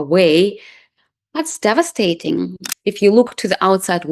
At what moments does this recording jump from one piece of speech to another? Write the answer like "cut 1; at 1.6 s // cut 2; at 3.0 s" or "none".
cut 1; at 2.7 s